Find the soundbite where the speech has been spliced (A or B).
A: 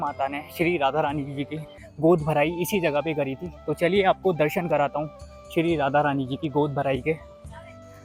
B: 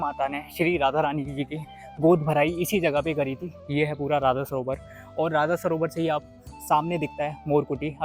B